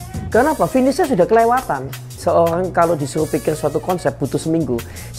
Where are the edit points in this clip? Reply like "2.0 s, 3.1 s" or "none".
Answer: 2.2 s